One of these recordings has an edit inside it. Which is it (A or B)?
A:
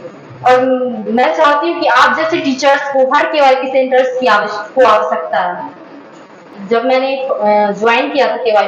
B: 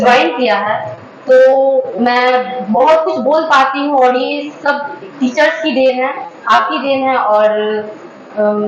A